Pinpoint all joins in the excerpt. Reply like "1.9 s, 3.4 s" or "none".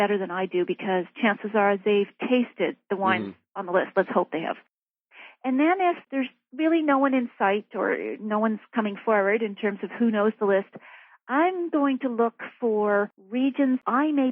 4.8 s, 13.2 s